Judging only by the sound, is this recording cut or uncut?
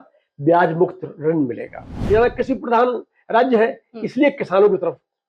cut